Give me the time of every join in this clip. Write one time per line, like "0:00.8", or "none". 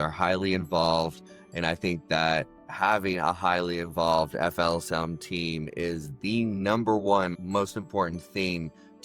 0:07.4